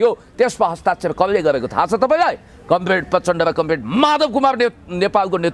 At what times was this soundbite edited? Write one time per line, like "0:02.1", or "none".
none